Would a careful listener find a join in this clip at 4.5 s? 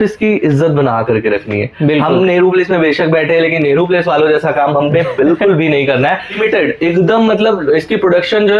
no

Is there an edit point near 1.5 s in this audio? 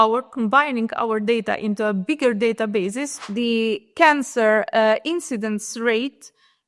no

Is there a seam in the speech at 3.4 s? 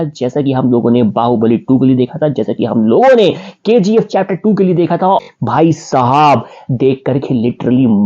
no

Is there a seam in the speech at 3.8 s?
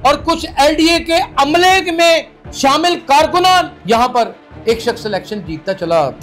yes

